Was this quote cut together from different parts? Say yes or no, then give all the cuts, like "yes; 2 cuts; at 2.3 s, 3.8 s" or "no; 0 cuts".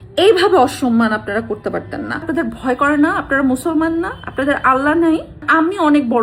yes; 2 cuts; at 2.3 s, 5.4 s